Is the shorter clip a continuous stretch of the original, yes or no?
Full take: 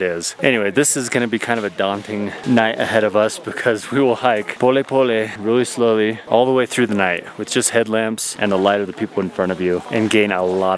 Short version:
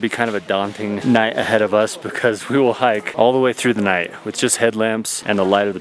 no